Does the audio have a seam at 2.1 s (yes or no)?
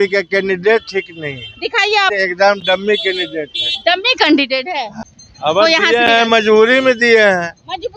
yes